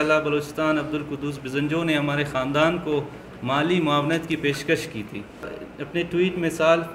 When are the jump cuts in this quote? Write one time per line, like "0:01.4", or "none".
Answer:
0:05.5